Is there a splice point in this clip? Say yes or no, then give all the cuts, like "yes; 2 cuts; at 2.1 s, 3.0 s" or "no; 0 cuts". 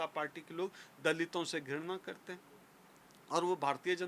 no; 0 cuts